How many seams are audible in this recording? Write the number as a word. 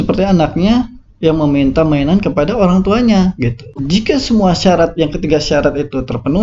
one